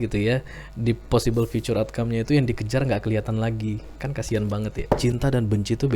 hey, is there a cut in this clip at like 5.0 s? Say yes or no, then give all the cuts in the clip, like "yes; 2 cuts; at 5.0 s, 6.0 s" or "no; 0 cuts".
yes; 1 cut; at 5.0 s